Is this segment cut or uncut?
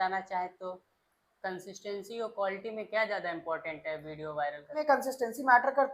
cut